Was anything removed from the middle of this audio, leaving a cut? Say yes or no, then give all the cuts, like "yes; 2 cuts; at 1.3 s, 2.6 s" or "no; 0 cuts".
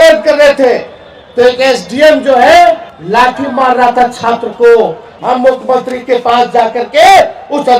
yes; 2 cuts; at 2.9 s, 5.1 s